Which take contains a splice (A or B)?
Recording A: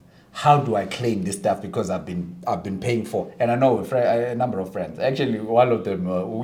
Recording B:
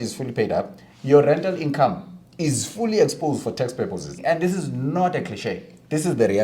B